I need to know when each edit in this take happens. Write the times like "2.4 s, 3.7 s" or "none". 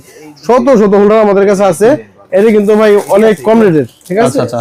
none